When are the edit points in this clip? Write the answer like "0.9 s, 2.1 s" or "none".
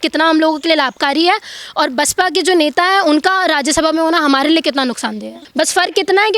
5.4 s